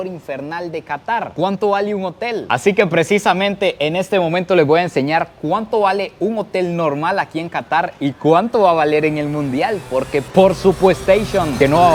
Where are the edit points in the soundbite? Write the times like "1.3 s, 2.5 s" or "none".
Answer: none